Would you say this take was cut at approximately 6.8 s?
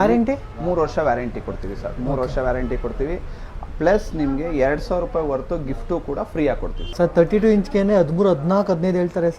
yes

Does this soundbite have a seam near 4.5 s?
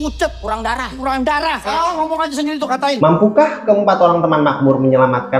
no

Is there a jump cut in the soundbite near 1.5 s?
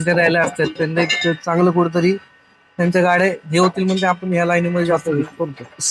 no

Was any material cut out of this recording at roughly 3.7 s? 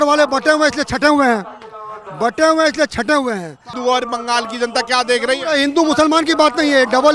yes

